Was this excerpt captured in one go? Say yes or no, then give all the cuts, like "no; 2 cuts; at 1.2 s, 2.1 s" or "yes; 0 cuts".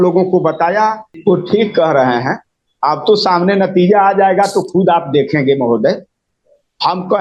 no; 1 cut; at 1.1 s